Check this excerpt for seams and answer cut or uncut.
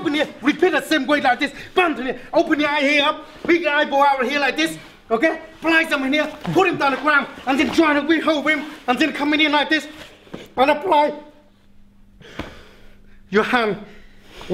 uncut